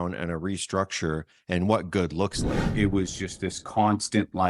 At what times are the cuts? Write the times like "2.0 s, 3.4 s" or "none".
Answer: 2.7 s

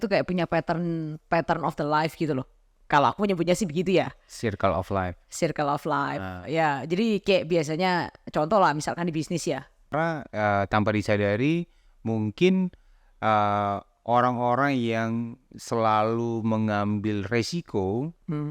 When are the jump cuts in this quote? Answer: 9.9 s

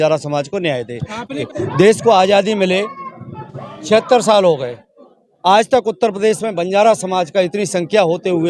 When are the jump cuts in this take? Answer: 1.4 s

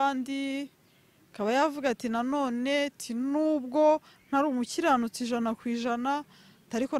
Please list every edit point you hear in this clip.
none

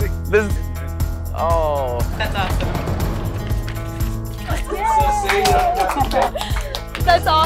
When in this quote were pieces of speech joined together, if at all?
4.4 s

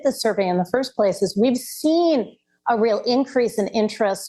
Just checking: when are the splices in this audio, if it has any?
none

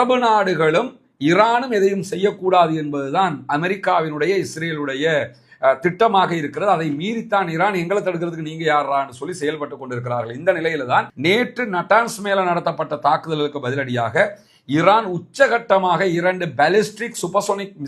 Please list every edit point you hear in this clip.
none

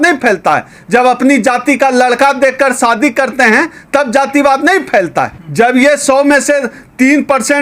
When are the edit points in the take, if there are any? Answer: 5.4 s

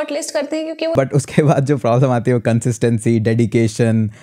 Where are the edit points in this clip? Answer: 0.9 s

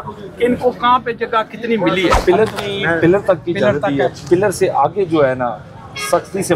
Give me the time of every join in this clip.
2.2 s

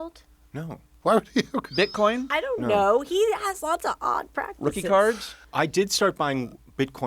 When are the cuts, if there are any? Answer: 5.4 s

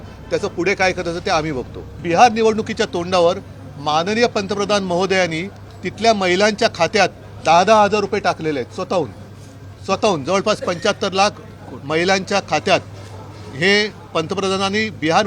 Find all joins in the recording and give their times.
2.0 s

